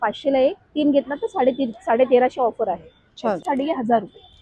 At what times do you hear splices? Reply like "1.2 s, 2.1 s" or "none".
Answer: 3.4 s